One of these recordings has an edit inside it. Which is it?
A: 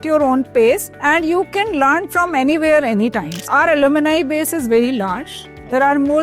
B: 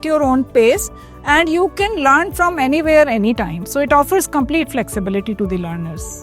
A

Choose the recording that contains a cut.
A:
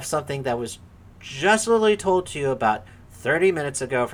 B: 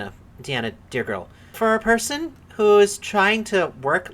B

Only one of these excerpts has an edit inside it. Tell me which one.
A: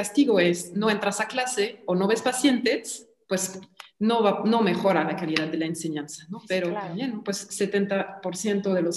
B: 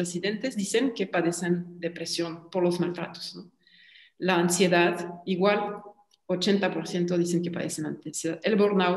A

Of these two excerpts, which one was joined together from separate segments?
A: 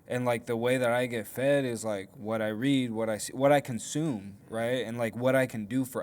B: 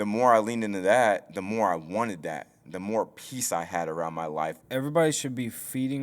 B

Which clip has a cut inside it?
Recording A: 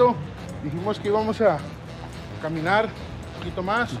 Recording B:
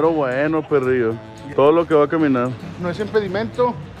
B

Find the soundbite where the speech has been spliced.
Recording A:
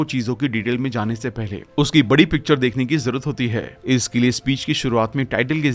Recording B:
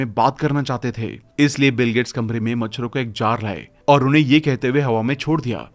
B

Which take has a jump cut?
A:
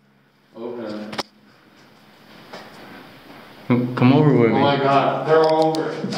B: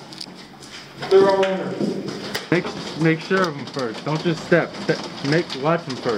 B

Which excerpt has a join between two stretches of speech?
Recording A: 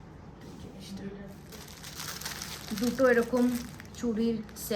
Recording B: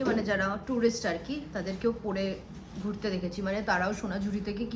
A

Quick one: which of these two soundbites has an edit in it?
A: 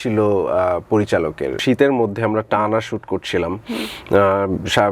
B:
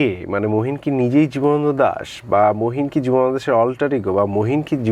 A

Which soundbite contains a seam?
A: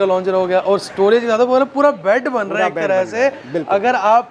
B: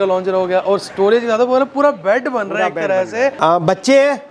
B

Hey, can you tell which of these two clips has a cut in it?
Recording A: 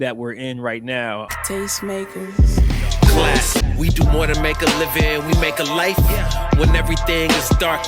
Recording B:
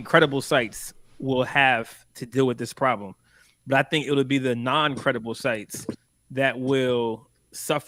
A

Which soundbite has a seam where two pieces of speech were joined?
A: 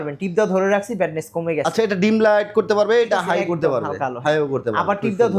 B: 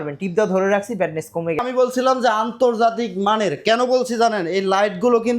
B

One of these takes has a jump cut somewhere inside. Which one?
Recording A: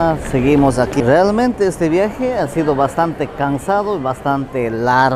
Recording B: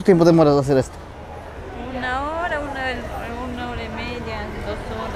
A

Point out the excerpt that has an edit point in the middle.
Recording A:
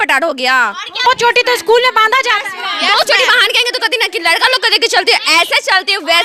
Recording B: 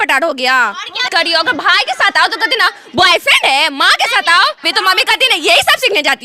B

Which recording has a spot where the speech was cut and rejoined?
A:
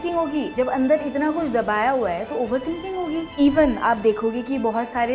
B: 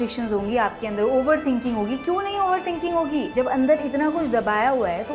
A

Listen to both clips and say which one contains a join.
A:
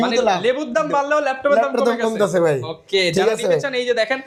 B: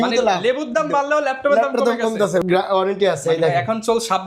B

